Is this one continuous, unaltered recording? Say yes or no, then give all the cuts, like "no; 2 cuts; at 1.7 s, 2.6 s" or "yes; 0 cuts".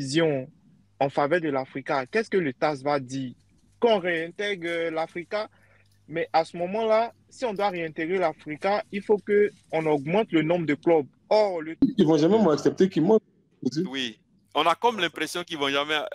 no; 1 cut; at 11.8 s